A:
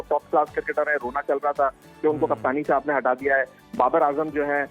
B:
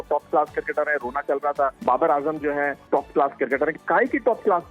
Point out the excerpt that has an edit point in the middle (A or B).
B